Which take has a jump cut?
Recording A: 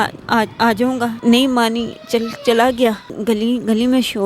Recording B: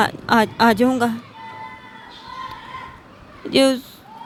A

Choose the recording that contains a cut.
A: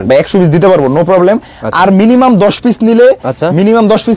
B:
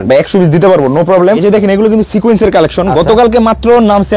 B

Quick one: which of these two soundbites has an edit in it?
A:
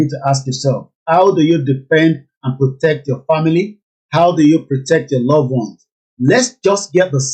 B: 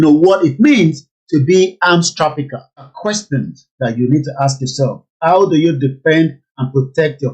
B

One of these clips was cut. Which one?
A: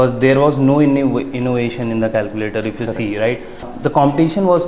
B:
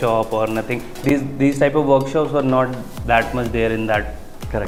A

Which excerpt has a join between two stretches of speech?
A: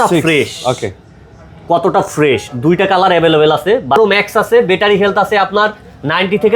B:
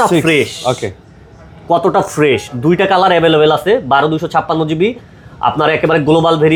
A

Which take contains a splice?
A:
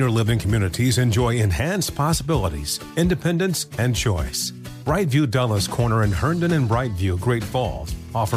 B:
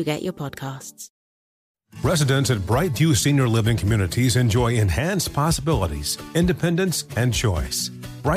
B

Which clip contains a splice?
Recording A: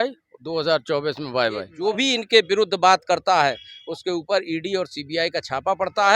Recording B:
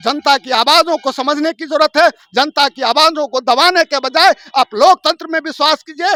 A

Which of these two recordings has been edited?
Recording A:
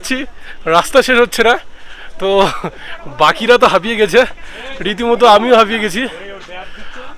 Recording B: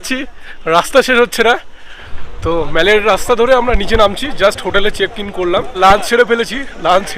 B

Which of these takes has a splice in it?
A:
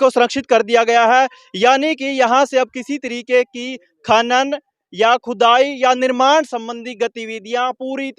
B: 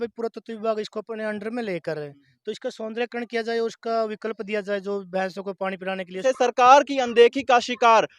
B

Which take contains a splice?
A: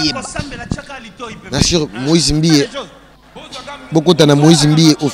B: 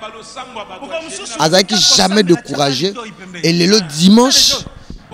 B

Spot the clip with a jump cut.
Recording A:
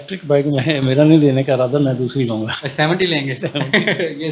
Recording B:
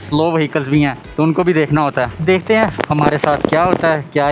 B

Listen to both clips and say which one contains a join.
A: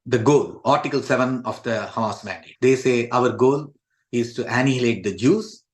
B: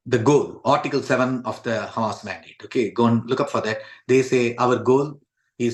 A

